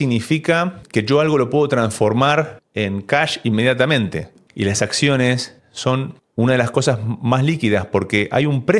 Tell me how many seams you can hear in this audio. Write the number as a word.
one